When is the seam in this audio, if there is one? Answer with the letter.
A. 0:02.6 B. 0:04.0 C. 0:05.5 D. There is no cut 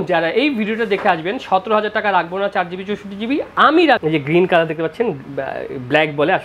B